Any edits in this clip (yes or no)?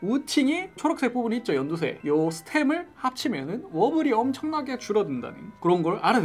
no